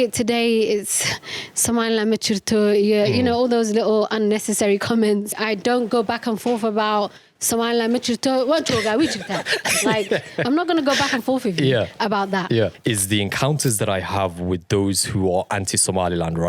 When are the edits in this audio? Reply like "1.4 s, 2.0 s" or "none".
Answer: 5.4 s, 12.8 s

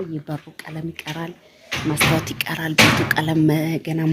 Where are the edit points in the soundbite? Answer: none

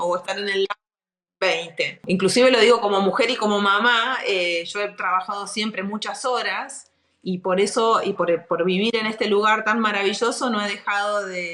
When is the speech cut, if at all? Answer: 2.0 s

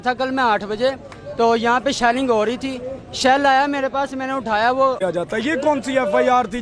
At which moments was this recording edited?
5.0 s

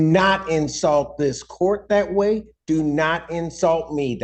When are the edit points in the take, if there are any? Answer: none

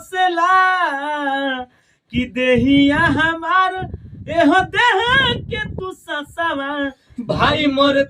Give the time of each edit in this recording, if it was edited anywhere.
none

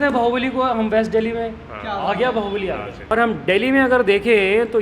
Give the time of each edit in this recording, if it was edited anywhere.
3.1 s

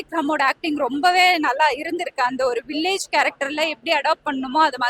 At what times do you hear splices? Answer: none

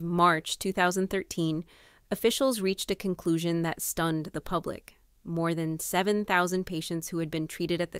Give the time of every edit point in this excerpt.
none

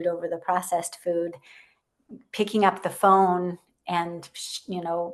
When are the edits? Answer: none

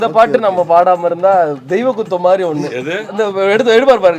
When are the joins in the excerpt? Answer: 3.0 s

